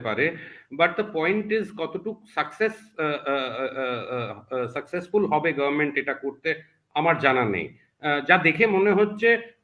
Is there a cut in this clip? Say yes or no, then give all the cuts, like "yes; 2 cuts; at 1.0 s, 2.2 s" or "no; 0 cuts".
no; 0 cuts